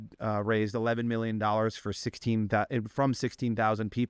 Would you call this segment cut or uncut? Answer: uncut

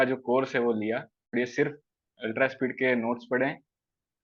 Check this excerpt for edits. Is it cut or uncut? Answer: cut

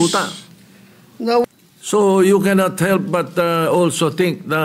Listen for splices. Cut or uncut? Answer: uncut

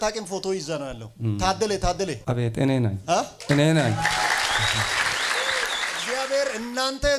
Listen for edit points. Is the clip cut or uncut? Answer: cut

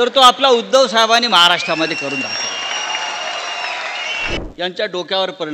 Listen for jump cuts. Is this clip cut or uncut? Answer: cut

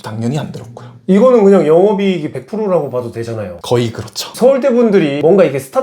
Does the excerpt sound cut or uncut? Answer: uncut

